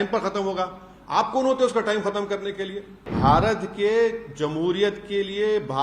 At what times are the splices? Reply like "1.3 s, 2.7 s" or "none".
3.1 s